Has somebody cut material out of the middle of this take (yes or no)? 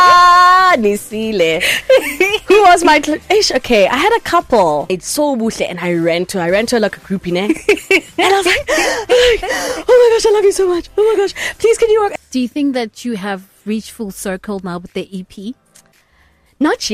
yes